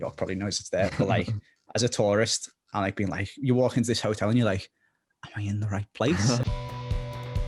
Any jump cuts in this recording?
yes; 1 cut; at 6.4 s

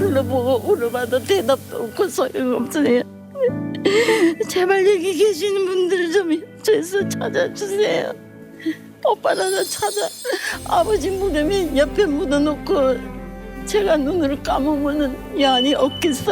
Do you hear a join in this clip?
no; 0 cuts

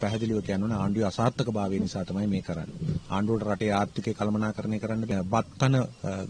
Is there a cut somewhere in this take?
yes; 1 cut; at 5.1 s

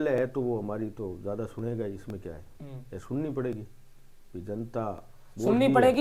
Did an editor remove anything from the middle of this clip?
no; 0 cuts

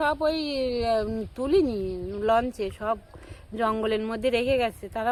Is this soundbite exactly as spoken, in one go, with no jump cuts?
yes; 0 cuts

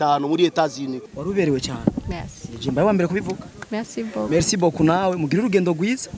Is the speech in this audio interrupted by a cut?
yes; 1 cut; at 1.0 s

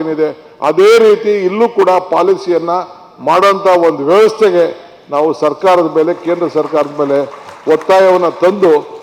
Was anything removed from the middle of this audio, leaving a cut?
no; 0 cuts

